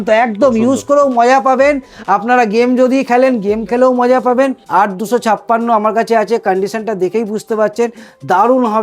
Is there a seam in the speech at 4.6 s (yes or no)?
yes